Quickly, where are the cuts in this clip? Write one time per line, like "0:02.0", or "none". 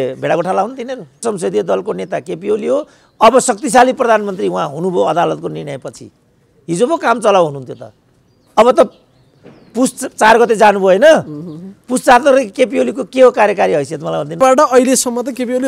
0:01.2
0:14.4